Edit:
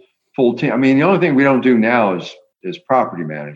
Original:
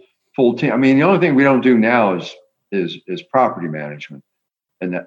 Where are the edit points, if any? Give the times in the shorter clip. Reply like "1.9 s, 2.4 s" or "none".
2.6 s